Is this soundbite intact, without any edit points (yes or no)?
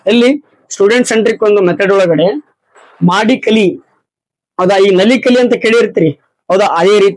yes